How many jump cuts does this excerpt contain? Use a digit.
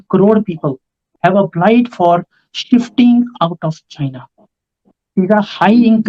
2